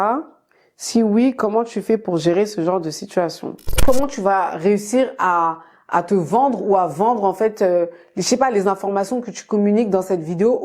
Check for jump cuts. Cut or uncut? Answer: cut